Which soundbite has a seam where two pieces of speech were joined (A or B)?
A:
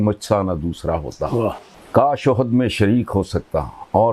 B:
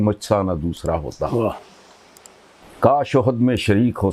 A